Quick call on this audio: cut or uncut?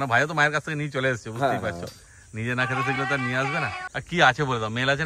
uncut